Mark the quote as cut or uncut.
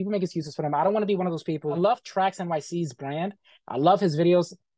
cut